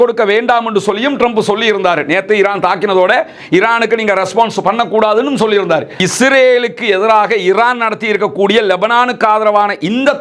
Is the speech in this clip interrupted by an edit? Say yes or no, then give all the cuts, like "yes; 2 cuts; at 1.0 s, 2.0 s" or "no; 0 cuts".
yes; 1 cut; at 5.9 s